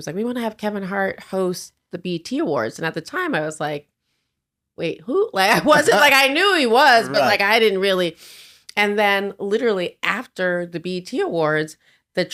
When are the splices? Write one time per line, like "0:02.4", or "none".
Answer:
none